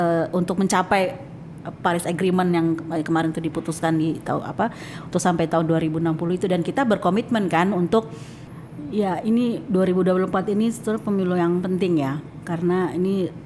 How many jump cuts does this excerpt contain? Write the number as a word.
one